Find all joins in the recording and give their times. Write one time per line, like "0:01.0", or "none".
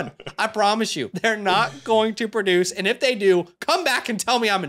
0:01.1

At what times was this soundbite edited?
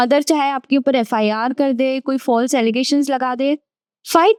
none

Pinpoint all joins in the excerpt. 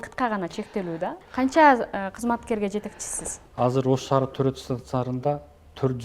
0:01.2

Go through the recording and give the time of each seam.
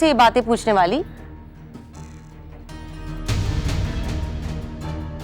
0:03.1

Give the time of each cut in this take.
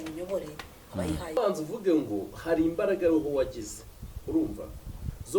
0:01.4

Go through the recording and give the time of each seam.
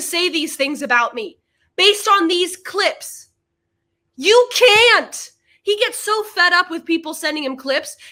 none

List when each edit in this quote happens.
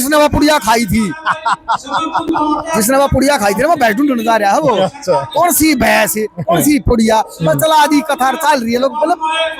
none

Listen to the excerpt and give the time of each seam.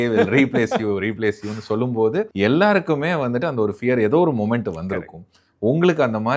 0:02.3

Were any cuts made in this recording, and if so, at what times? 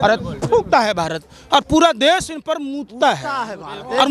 none

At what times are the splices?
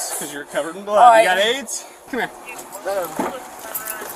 0:01.9

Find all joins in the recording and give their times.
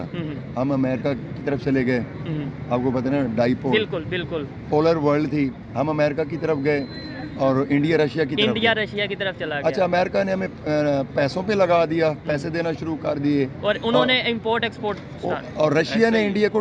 none

